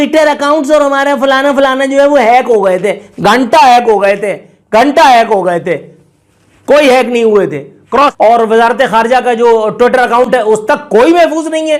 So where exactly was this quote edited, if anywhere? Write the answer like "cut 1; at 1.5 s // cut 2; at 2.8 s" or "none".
cut 1; at 8.0 s